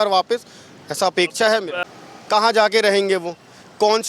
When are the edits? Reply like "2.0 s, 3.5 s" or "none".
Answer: 1.8 s